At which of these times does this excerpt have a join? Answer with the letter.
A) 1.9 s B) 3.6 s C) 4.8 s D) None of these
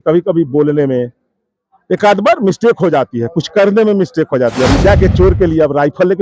C